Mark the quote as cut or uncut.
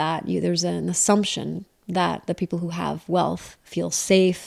uncut